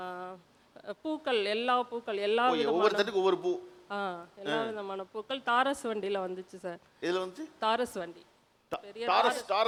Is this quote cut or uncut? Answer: uncut